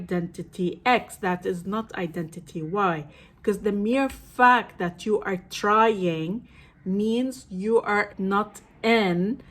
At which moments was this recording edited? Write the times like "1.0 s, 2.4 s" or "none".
8.1 s